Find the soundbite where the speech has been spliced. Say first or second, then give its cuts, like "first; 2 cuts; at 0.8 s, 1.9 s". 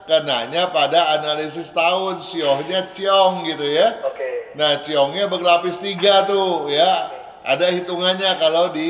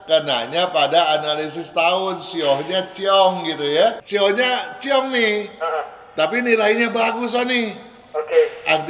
second; 1 cut; at 4.0 s